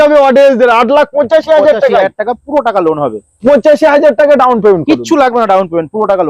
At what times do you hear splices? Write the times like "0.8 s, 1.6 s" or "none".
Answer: none